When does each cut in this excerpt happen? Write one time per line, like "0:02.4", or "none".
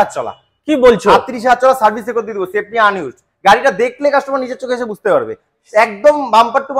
none